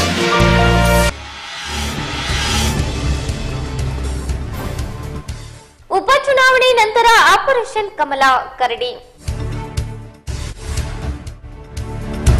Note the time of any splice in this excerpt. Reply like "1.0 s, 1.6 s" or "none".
none